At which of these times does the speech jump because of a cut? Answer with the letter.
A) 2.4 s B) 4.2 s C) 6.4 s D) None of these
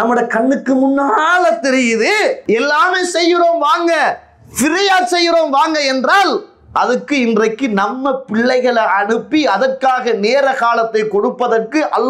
A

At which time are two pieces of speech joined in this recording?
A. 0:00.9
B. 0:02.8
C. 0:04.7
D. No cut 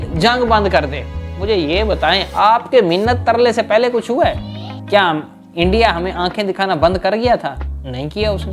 C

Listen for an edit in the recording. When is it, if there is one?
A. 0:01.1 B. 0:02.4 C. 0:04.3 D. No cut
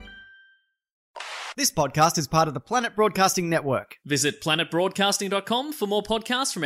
A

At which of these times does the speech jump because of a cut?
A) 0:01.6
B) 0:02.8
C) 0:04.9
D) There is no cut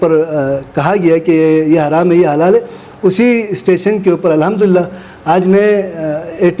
D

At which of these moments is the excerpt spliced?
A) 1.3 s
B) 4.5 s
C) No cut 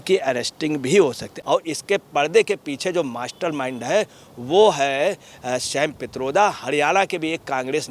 A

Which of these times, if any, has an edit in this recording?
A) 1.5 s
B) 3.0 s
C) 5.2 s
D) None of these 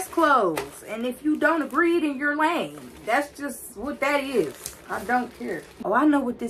D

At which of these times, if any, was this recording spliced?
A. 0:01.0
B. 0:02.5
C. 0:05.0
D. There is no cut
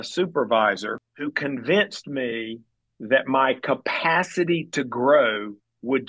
A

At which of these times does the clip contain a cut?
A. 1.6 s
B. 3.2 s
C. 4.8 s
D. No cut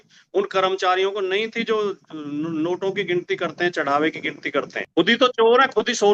C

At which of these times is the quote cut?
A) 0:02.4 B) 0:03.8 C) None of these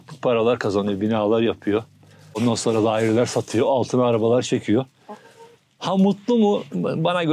A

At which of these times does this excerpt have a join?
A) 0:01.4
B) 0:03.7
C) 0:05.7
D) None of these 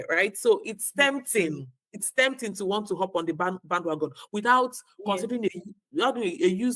D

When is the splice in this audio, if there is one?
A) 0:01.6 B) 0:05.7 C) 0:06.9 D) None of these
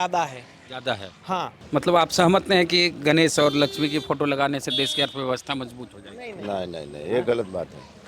A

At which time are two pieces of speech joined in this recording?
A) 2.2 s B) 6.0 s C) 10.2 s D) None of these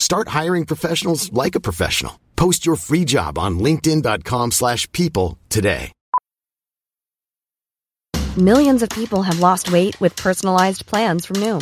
B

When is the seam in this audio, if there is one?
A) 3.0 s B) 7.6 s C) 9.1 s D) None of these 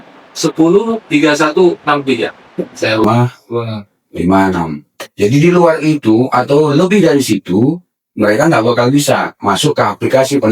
A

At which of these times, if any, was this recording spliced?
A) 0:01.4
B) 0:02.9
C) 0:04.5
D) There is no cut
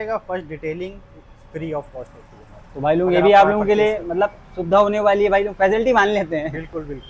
D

